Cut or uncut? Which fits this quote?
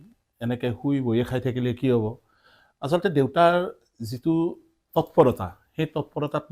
uncut